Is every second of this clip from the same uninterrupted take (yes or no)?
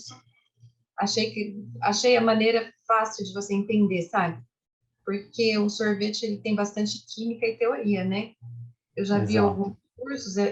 yes